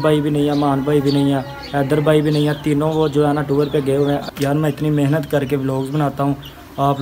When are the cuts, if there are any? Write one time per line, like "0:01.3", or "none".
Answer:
0:04.3